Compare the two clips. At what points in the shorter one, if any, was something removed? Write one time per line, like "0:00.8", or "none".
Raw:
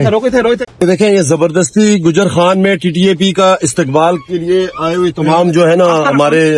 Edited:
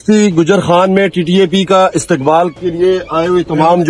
none

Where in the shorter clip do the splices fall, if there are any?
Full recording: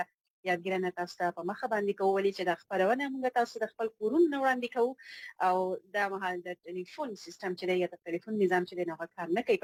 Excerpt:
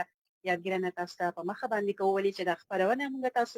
none

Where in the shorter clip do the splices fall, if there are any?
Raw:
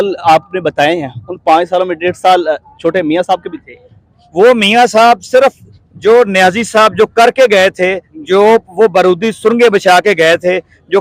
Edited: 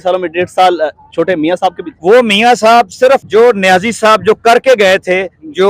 0:01.9
0:03.3

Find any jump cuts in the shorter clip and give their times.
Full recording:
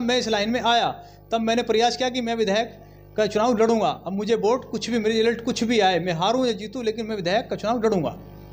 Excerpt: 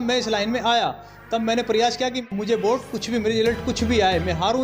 0:02.2

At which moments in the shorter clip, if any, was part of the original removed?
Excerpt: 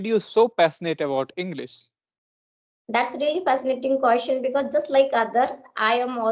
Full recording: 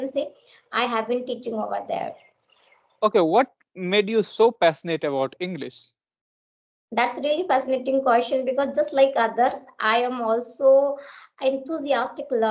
none

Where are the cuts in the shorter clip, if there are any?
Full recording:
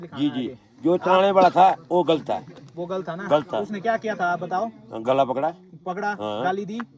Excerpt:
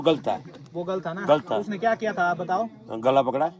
none

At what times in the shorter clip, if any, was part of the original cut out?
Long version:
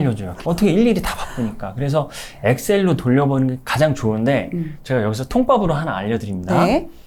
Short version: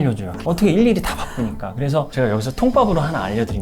0:02.1

